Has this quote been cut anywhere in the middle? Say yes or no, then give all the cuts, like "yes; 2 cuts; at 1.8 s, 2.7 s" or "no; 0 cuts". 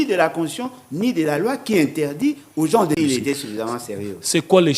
yes; 1 cut; at 3.0 s